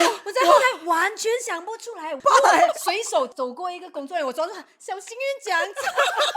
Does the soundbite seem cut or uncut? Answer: cut